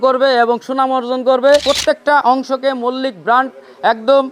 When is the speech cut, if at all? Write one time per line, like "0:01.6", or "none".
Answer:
0:01.6